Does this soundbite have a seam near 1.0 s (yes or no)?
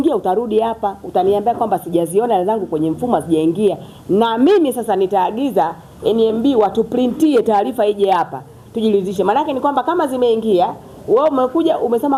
no